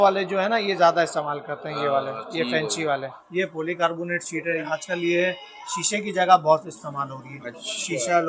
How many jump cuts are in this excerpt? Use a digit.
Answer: 2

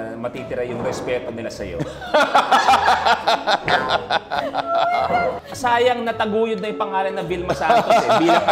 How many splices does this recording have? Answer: 1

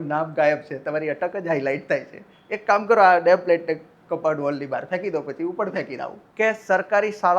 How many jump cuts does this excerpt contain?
1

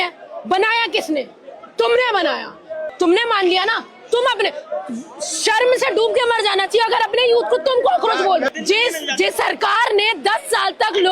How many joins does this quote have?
2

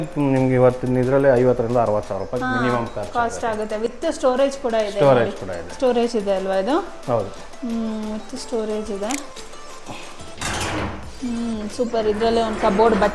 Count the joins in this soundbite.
0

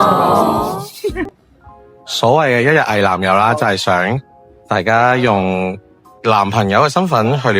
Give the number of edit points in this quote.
1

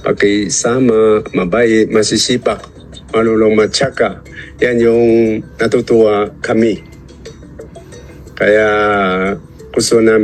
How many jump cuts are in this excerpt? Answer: 0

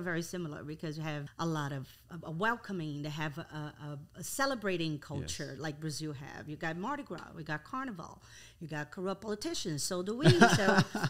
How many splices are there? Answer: 2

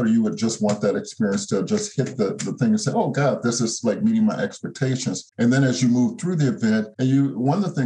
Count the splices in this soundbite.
2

